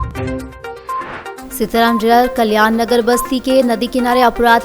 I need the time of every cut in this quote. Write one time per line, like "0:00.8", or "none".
0:01.3